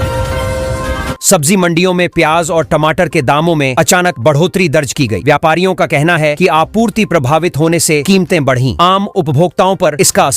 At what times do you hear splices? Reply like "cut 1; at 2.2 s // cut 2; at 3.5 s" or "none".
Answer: cut 1; at 1.2 s